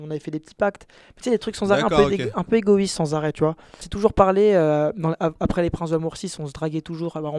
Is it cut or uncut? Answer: cut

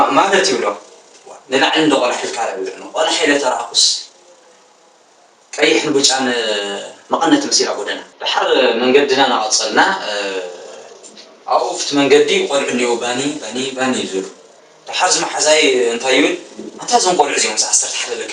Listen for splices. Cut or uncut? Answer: uncut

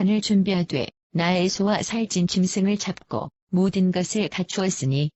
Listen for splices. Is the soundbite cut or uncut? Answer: uncut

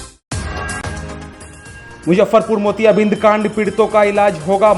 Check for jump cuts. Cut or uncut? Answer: uncut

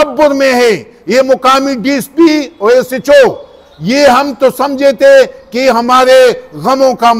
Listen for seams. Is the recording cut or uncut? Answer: uncut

